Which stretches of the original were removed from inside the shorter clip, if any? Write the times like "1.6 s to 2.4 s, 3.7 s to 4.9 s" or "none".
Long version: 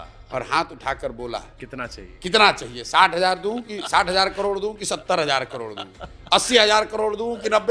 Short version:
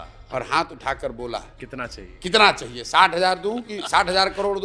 none